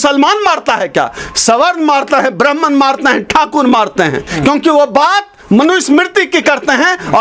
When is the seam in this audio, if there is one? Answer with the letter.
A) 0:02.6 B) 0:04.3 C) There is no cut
B